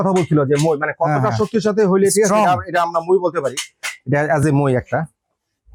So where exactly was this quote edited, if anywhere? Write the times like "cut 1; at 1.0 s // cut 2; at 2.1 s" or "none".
none